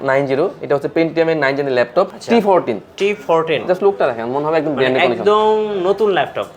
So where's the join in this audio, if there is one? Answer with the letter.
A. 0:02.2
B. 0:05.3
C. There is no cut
A